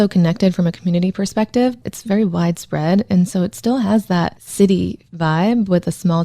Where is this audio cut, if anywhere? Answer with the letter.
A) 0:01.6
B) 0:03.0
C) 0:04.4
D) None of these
C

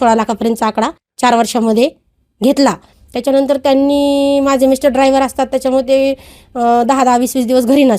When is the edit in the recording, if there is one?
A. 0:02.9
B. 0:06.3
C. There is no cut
A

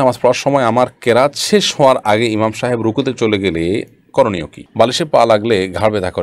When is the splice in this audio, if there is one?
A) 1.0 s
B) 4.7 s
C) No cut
B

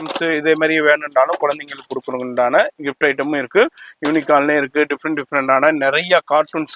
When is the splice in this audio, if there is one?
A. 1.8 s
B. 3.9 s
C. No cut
C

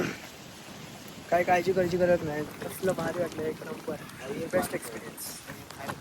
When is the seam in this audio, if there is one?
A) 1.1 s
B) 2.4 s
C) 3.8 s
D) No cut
B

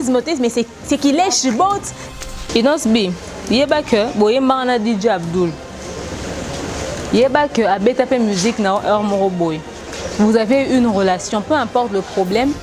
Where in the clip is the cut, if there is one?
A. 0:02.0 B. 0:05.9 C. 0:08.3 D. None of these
A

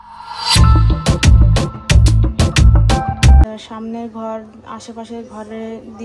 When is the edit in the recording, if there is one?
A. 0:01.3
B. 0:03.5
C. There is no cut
B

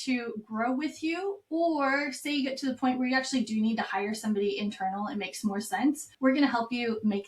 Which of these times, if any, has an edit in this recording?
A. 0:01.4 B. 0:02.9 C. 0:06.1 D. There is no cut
C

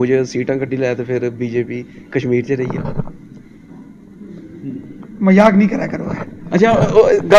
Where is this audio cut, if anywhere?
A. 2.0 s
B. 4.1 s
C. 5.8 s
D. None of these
D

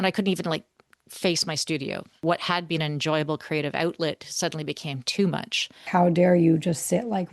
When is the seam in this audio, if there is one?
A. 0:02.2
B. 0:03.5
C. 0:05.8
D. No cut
C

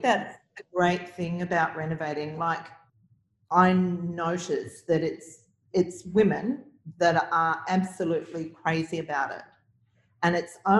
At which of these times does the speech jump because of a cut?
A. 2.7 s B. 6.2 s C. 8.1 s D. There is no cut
A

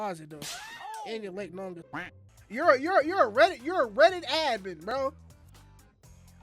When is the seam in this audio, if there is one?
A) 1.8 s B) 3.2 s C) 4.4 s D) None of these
A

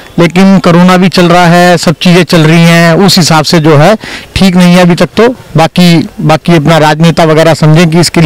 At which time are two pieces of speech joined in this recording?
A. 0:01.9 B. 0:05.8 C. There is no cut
C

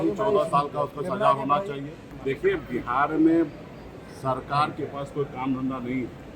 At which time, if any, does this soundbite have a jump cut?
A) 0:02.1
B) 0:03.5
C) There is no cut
A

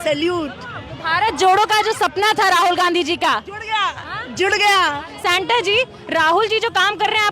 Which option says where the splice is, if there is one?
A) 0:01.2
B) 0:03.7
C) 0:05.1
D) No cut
C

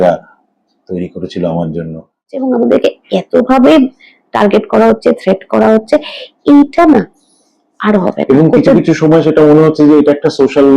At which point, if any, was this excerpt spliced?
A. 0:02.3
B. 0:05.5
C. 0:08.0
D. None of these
A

